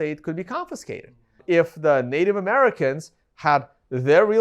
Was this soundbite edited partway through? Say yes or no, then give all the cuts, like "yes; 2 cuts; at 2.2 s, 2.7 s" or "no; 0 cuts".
yes; 1 cut; at 1.4 s